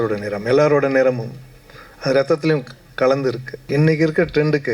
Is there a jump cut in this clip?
yes; 1 cut; at 3.6 s

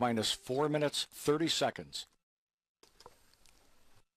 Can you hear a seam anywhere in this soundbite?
yes; 1 cut; at 3.2 s

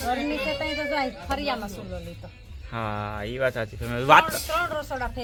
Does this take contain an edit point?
no; 0 cuts

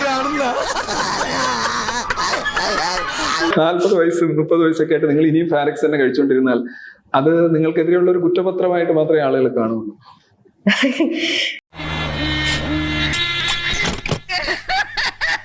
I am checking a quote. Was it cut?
yes; 1 cut; at 13.1 s

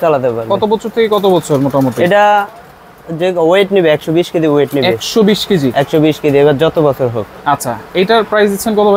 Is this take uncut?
yes; 0 cuts

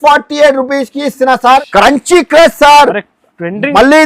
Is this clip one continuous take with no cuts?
no; 1 cut; at 1.5 s

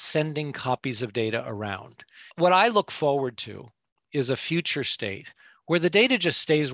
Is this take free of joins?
no; 1 cut; at 2.2 s

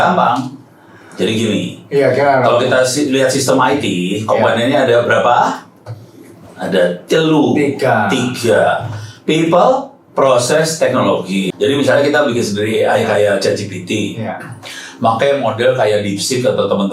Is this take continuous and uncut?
no; 1 cut; at 11.5 s

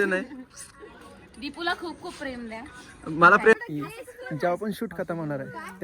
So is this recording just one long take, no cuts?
no; 1 cut; at 3.5 s

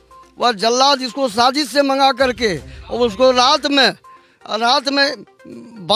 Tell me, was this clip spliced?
no; 0 cuts

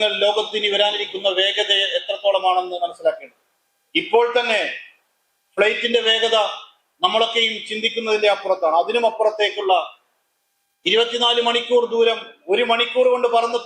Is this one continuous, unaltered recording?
yes; 0 cuts

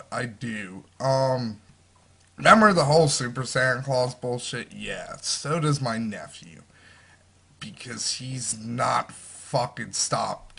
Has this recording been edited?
yes; 1 cut; at 3.4 s

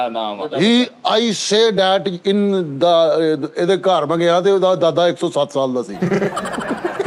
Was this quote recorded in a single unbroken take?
yes; 0 cuts

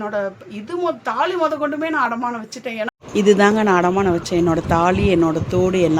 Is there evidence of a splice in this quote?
no; 0 cuts

